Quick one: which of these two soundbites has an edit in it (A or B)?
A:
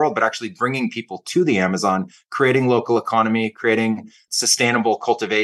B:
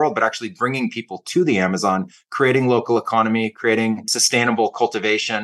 B